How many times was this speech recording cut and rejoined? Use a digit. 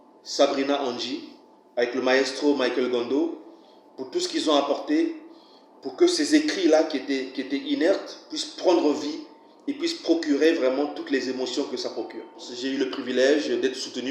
1